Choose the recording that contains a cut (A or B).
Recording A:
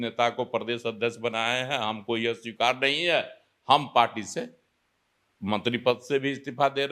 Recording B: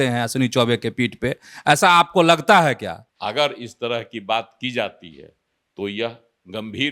B